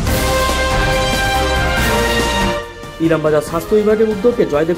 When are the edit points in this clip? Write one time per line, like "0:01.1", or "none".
0:02.8